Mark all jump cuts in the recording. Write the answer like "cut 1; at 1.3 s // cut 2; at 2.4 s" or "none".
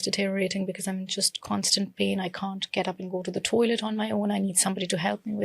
none